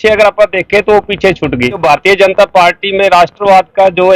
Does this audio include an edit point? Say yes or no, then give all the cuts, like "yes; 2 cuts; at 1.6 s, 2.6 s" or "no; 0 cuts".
yes; 1 cut; at 1.8 s